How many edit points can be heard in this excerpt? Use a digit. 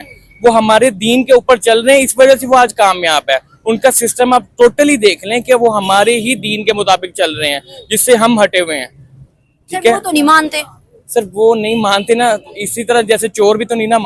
0